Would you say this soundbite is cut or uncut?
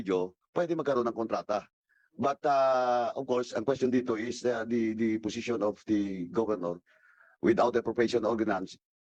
uncut